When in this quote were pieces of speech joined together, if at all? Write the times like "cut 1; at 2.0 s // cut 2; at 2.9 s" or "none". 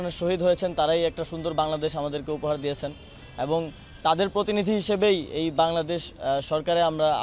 none